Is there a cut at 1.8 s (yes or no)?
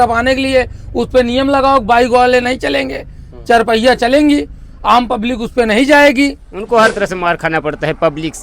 no